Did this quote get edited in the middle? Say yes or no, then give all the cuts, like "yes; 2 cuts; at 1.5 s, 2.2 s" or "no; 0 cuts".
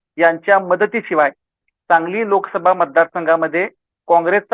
no; 0 cuts